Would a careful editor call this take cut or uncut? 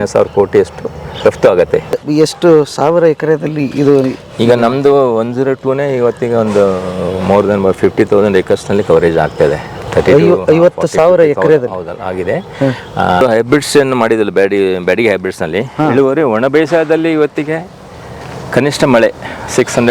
cut